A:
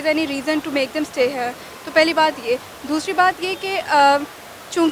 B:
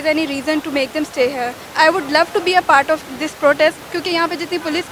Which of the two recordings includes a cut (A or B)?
B